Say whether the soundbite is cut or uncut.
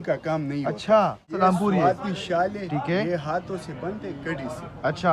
uncut